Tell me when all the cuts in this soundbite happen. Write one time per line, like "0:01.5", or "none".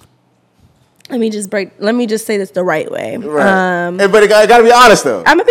none